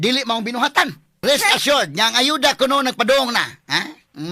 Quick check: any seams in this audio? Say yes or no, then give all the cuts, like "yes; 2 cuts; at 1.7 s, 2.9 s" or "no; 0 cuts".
yes; 1 cut; at 1.2 s